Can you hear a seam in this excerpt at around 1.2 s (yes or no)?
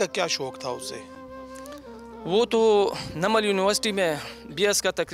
no